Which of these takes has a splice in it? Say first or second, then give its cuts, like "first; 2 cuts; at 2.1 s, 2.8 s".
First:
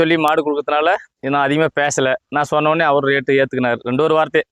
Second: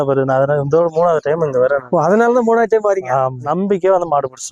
second; 2 cuts; at 1.8 s, 3.5 s